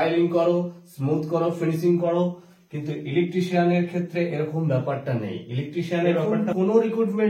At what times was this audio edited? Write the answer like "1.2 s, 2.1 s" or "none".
6.2 s

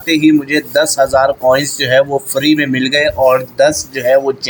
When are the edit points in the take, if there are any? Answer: none

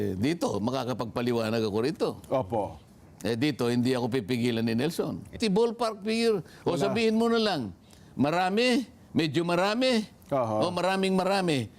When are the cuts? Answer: 5.4 s

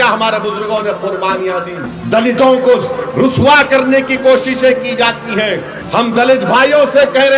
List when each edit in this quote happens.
1.9 s, 5.7 s

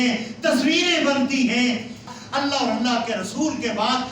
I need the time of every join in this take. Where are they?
2.1 s

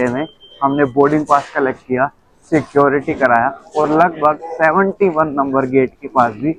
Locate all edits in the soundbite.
none

